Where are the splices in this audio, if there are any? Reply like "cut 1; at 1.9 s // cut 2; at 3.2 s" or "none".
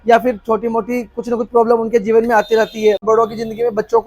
cut 1; at 3.0 s

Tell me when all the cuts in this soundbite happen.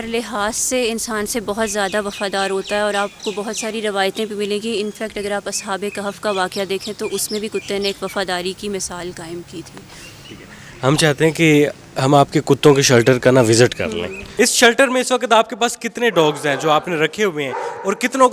none

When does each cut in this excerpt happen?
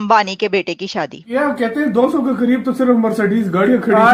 cut 1; at 1.2 s

